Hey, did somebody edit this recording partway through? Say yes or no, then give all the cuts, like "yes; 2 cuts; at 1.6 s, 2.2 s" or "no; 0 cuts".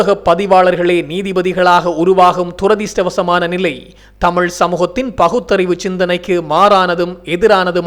no; 0 cuts